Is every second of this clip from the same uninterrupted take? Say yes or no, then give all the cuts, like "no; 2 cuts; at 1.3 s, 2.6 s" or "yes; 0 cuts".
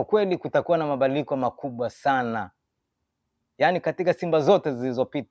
yes; 0 cuts